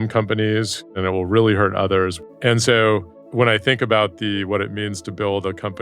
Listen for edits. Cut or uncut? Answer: cut